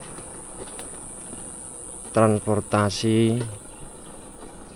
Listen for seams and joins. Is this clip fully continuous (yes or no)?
yes